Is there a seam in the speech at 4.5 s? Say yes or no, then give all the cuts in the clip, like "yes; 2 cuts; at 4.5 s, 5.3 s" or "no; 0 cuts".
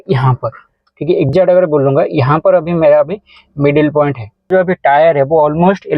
yes; 1 cut; at 4.5 s